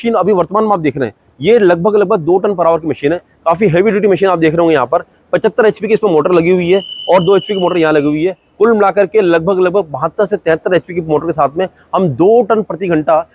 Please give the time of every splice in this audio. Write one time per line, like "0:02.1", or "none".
none